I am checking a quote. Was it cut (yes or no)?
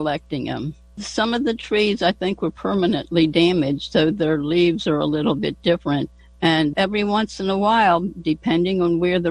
yes